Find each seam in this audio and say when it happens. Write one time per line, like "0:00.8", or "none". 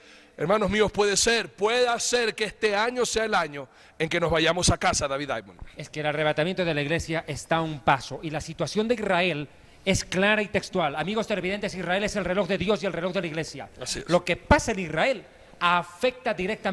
none

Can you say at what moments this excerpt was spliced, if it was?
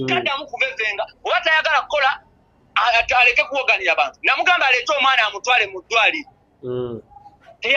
none

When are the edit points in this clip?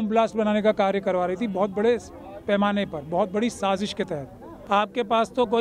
0:04.5

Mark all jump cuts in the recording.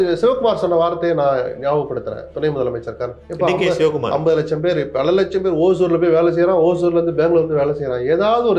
0:03.2

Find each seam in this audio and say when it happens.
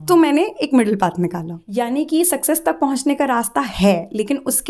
0:01.6

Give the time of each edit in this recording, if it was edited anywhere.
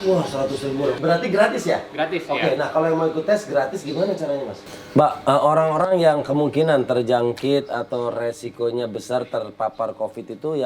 0:01.0
0:04.6

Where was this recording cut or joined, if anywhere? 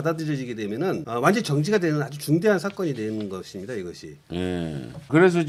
none

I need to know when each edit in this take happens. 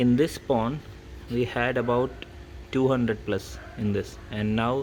none

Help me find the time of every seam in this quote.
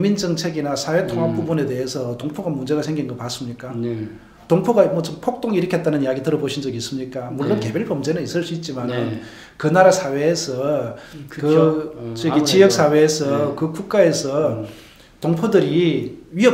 none

